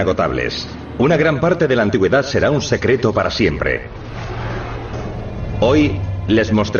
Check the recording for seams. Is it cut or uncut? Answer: cut